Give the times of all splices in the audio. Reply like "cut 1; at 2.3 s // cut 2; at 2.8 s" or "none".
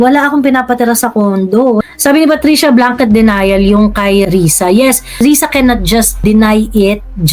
cut 1; at 1.8 s // cut 2; at 4.3 s // cut 3; at 5.2 s // cut 4; at 6.2 s